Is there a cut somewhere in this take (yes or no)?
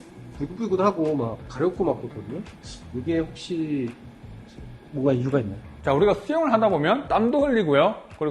no